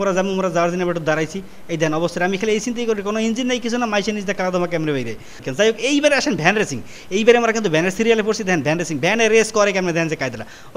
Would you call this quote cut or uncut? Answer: cut